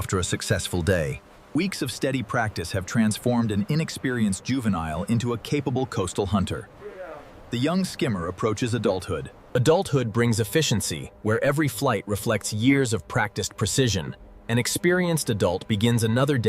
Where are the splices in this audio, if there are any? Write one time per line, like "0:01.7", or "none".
0:09.5